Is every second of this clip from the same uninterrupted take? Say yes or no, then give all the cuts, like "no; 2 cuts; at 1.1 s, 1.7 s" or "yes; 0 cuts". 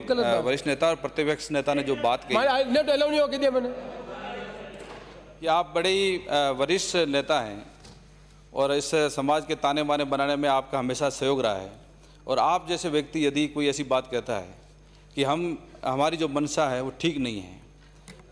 yes; 0 cuts